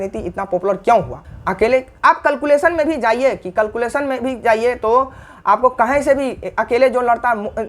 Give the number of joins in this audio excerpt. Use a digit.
1